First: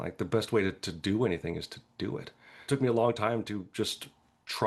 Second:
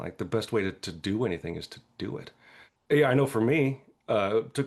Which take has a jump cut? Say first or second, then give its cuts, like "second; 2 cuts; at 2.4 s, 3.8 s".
first; 1 cut; at 2.6 s